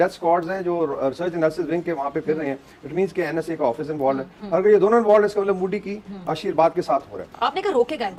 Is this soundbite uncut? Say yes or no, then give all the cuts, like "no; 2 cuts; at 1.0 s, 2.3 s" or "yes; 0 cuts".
yes; 0 cuts